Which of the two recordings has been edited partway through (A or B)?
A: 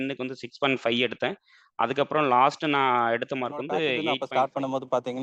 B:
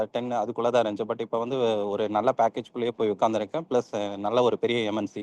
A